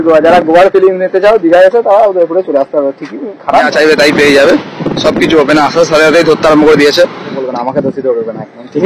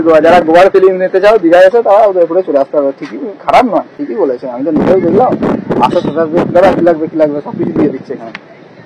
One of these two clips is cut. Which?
first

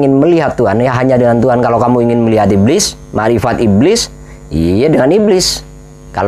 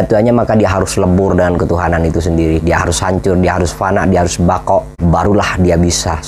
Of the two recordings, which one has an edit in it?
second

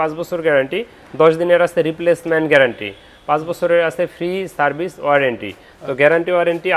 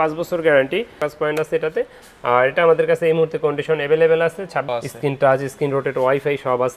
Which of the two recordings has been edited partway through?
second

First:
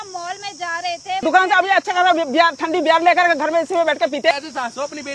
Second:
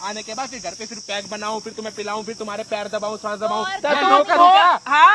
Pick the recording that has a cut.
first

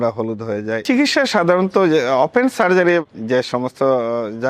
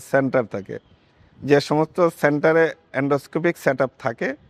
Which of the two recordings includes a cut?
first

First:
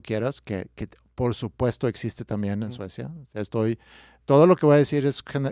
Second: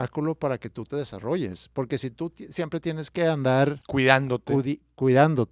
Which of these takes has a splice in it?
second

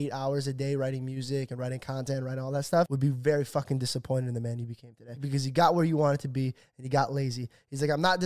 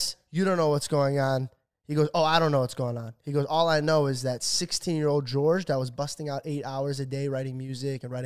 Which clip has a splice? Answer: first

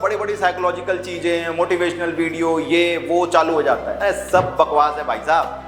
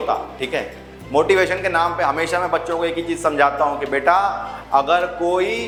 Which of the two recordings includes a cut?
first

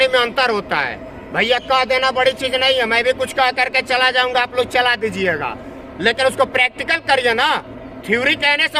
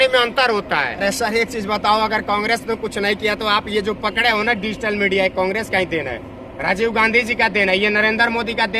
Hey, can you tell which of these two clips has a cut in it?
second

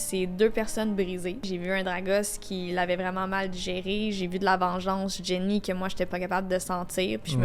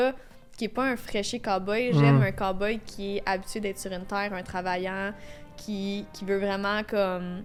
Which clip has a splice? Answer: first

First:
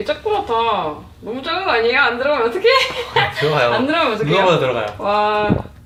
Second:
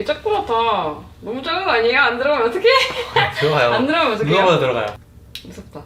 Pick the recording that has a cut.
second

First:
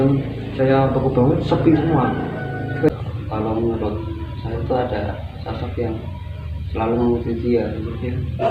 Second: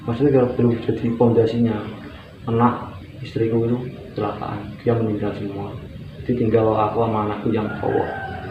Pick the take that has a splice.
first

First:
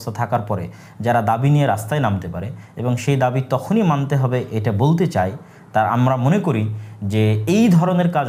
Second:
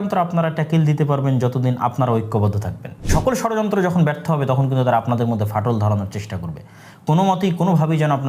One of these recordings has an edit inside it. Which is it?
second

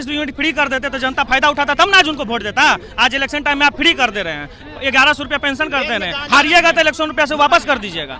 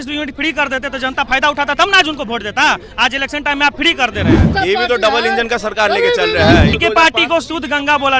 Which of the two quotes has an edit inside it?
second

